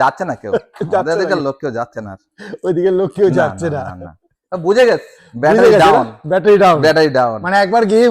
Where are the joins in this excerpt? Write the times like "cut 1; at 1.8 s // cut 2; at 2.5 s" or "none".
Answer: none